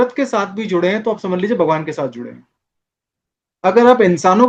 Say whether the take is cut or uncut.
uncut